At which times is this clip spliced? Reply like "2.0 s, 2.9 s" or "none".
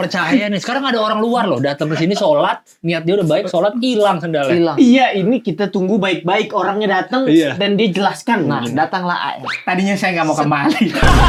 none